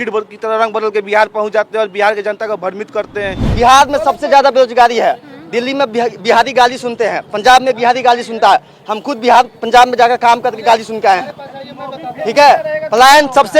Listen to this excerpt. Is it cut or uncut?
cut